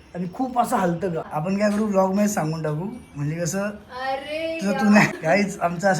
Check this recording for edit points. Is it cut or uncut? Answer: cut